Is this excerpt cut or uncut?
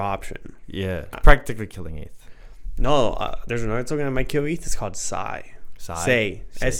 cut